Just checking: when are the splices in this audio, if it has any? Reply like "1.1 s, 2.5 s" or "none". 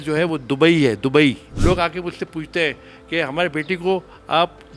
1.5 s

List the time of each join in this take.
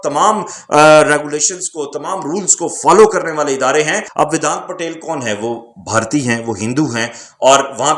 4.0 s

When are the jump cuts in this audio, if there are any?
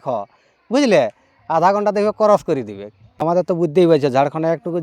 3.2 s

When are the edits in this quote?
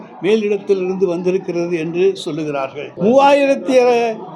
2.9 s

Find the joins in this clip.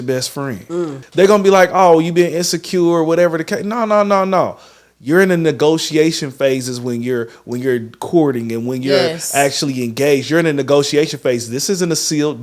1.0 s

